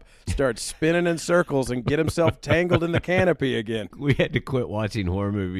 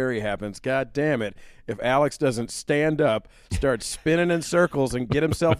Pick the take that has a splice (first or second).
first